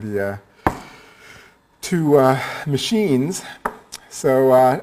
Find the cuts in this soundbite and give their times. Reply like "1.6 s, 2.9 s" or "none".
none